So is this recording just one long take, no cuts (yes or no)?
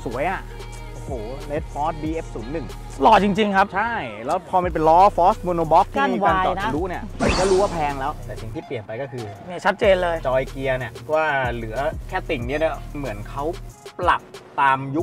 no